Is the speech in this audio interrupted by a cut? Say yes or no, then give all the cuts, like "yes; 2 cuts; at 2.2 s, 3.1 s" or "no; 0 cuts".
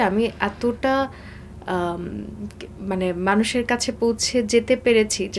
no; 0 cuts